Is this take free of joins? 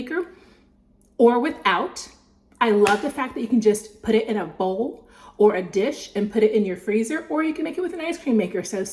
yes; 0 cuts

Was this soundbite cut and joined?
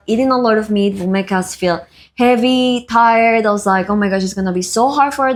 no; 0 cuts

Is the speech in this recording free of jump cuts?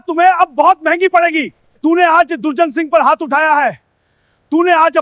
yes; 0 cuts

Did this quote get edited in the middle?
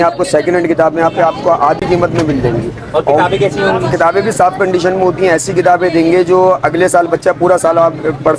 no; 0 cuts

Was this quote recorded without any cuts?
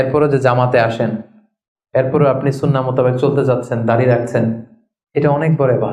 yes; 0 cuts

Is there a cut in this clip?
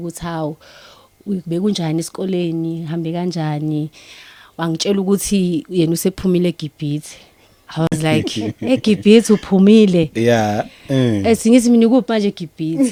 no; 0 cuts

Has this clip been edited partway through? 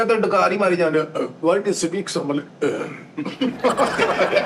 yes; 1 cut; at 3.5 s

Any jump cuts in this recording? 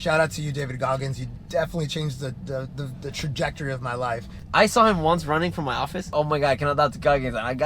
yes; 2 cuts; at 4.5 s, 6.1 s

